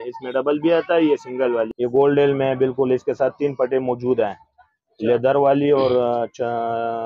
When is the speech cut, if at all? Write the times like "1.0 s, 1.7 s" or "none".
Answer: 1.7 s